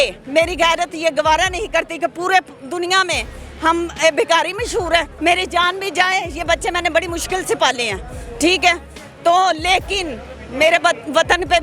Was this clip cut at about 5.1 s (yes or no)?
yes